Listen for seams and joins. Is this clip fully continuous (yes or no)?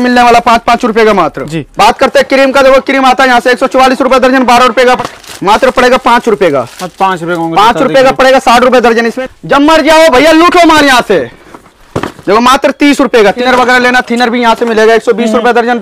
no